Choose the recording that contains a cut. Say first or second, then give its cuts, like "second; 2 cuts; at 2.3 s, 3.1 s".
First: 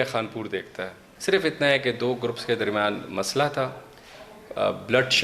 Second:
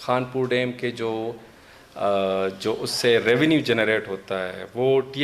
first; 1 cut; at 1.0 s